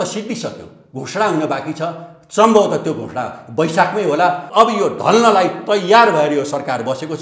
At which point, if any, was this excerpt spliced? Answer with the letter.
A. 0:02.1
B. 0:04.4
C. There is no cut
B